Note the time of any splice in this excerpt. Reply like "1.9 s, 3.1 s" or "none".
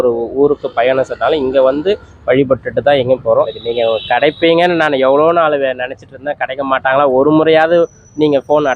3.5 s